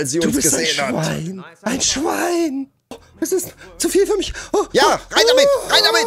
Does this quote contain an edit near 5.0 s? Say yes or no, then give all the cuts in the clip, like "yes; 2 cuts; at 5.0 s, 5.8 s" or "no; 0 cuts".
no; 1 cut; at 3.1 s